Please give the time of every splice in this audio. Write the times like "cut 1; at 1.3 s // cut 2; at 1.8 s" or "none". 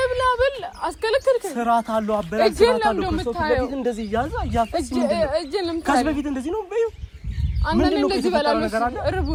none